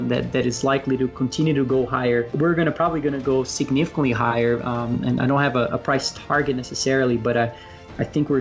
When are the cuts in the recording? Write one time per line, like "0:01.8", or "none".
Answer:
0:02.3